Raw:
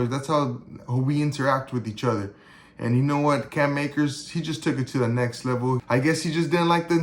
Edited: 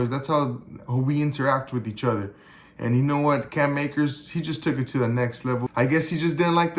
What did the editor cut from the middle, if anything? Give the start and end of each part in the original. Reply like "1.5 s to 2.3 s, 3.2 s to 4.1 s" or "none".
5.6 s to 5.8 s